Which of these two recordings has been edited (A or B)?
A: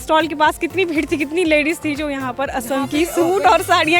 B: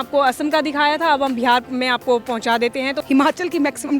B